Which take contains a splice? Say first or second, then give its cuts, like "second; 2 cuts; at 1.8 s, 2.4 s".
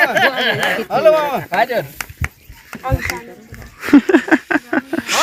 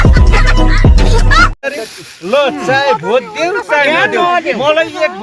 second; 1 cut; at 1.7 s